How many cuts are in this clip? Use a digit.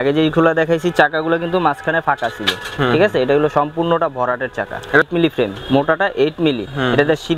1